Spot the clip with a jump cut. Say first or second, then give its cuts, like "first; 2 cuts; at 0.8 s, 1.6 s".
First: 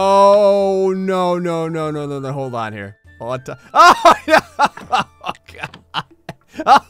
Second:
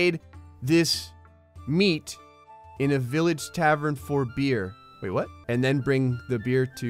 second; 1 cut; at 5.4 s